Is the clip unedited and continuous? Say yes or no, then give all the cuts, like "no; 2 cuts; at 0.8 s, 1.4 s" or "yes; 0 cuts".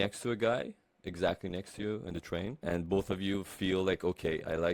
no; 1 cut; at 2.6 s